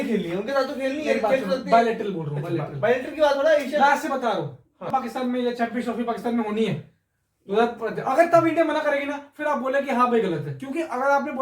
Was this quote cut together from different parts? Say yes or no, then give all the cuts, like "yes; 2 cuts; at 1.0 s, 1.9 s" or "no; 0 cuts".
yes; 1 cut; at 4.9 s